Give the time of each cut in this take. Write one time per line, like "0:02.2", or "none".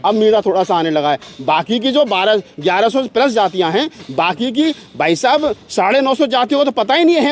none